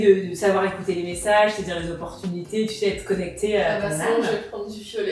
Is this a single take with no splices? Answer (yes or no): yes